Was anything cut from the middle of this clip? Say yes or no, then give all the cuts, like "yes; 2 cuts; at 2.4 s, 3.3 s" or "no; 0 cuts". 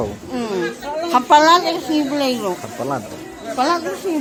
no; 0 cuts